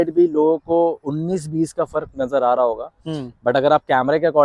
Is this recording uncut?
yes; 0 cuts

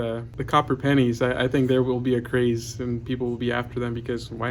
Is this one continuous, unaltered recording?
yes; 0 cuts

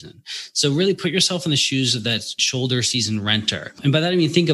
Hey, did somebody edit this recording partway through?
yes; 2 cuts; at 2.4 s, 3.8 s

